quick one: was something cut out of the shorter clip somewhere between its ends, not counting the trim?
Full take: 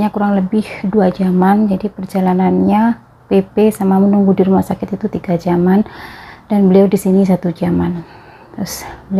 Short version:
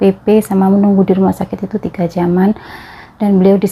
no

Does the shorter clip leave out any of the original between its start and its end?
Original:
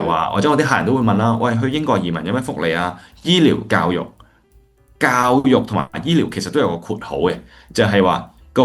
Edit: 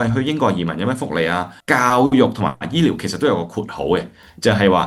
yes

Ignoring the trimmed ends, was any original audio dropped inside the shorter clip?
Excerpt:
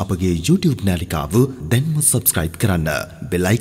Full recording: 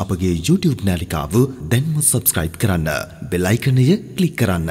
no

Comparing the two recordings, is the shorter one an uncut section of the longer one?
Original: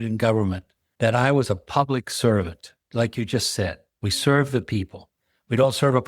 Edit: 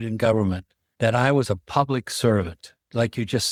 yes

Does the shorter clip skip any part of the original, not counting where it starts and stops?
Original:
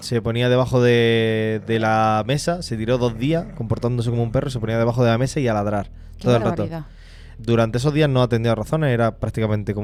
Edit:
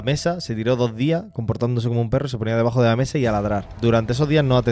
yes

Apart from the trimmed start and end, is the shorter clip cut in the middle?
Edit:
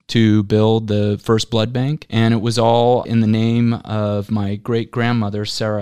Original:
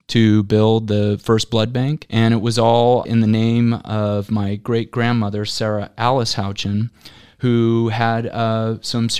no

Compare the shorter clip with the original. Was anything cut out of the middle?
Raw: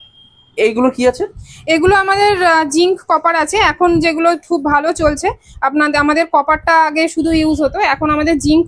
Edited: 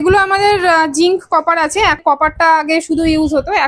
yes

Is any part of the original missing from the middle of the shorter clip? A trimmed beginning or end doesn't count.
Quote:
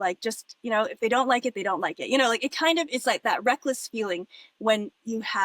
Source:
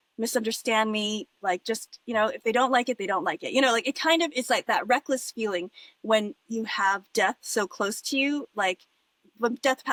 no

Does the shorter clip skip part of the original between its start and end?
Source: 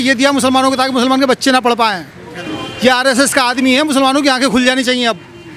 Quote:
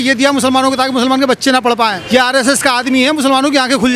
yes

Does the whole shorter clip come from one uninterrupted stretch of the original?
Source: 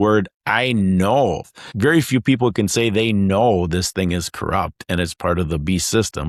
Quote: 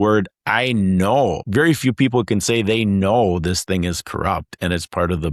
no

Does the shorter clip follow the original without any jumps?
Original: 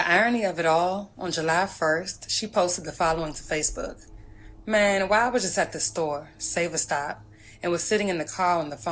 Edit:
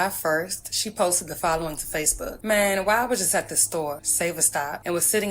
no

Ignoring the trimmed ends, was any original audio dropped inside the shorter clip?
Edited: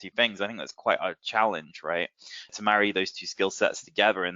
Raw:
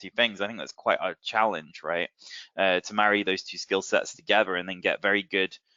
yes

